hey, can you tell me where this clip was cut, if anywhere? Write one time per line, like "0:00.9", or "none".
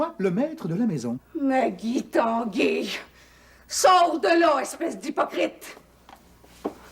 0:01.2